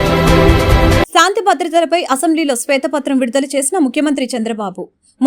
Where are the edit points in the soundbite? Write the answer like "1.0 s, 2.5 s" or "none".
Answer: 1.0 s